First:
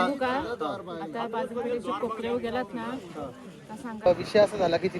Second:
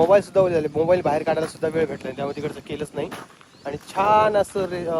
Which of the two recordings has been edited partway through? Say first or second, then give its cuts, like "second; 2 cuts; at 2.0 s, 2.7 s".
first; 1 cut; at 4.1 s